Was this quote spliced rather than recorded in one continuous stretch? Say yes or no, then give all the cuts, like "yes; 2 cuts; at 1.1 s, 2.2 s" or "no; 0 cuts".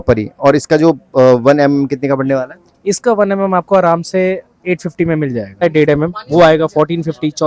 yes; 1 cut; at 5.6 s